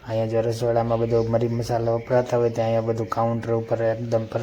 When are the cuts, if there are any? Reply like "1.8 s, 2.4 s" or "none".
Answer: none